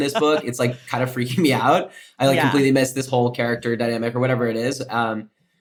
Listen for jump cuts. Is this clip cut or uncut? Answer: uncut